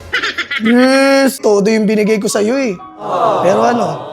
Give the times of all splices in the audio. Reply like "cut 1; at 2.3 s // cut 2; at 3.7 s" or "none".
cut 1; at 1.4 s